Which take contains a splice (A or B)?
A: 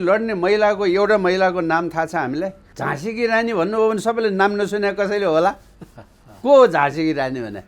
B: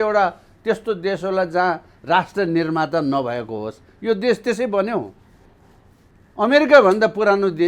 A